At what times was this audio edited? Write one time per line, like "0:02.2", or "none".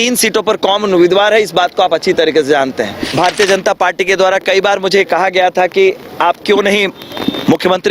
0:03.0